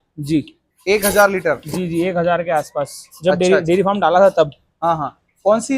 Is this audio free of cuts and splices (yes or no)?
yes